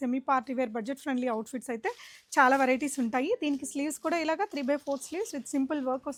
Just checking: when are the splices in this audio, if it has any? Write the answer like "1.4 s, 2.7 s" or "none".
none